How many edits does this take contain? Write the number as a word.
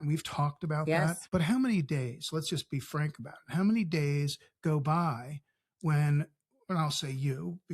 one